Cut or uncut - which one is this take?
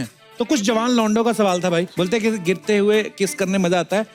uncut